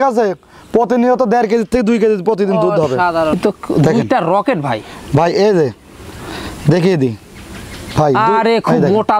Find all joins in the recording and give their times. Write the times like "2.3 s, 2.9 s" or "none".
3.3 s